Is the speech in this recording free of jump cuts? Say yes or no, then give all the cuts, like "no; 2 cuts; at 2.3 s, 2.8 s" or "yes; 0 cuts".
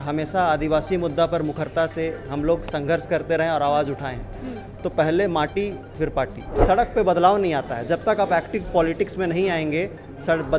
no; 1 cut; at 6.5 s